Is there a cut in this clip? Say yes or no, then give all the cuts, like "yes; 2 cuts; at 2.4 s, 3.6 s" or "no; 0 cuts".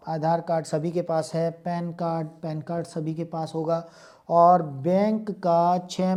no; 0 cuts